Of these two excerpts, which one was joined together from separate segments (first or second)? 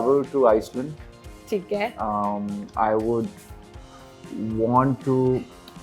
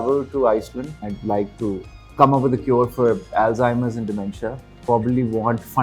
second